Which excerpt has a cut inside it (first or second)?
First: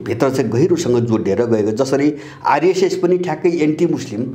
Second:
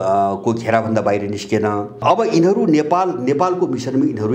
second